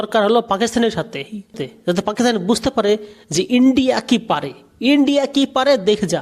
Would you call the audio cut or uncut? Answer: cut